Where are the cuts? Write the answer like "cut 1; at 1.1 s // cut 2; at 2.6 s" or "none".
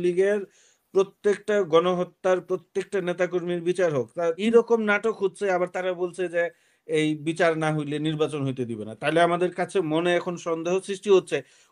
cut 1; at 4.4 s